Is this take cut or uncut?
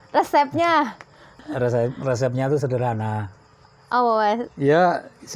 cut